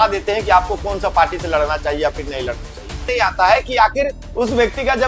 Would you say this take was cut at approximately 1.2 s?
no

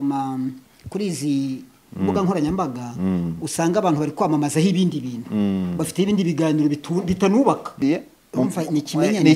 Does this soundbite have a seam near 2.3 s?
no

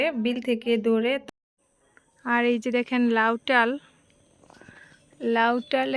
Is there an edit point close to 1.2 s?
yes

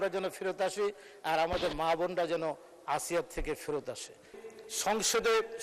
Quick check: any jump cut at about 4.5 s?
yes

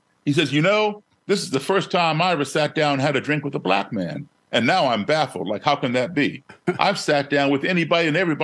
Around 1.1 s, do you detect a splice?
yes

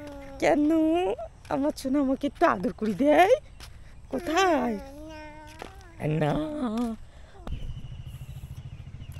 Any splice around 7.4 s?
yes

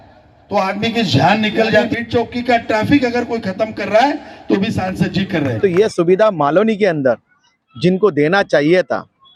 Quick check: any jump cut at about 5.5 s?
yes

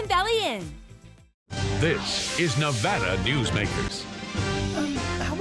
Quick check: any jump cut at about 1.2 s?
no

